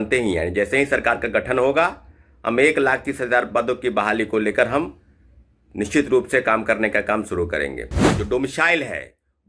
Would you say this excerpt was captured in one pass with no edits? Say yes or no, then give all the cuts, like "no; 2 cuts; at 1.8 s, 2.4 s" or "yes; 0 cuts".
no; 1 cut; at 8.1 s